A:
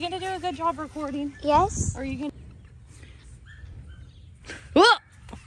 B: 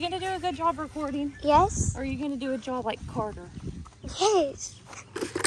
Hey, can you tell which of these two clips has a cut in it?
A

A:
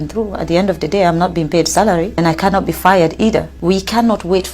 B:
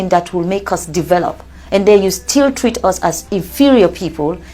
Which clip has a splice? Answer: A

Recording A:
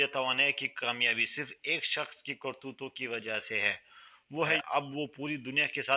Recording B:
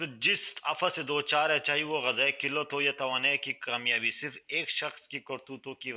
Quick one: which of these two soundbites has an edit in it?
A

